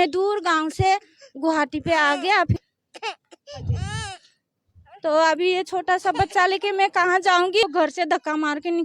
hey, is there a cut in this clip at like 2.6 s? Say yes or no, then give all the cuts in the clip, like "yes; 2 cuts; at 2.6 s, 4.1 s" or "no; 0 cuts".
yes; 2 cuts; at 2.6 s, 7.6 s